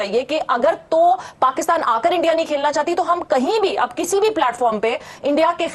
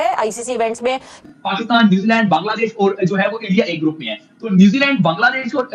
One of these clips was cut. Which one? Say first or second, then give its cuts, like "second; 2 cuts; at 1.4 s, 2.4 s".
second; 1 cut; at 1.2 s